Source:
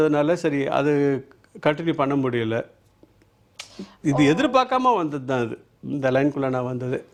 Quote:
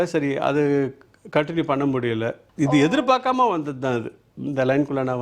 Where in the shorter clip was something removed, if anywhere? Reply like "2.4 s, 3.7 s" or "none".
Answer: 2.4 s